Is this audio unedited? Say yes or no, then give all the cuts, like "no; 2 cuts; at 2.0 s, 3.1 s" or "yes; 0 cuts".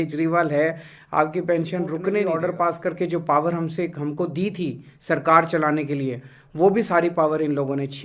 no; 1 cut; at 2.4 s